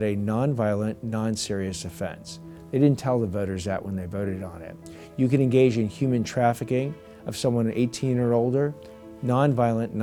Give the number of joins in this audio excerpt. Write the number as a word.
zero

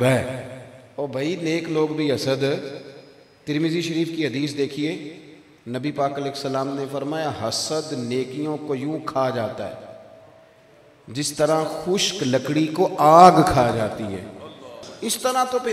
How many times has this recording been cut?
one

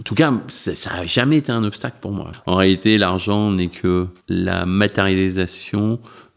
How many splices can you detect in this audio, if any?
two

